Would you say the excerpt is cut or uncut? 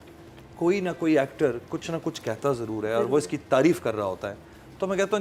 uncut